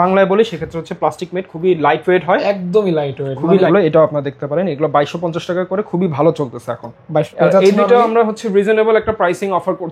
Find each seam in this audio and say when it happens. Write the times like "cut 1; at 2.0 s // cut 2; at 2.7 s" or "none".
cut 1; at 3.7 s // cut 2; at 7.3 s